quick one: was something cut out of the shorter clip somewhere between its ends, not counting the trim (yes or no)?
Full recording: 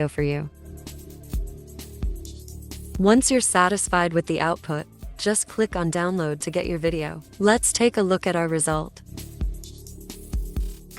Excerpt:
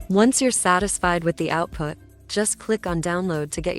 no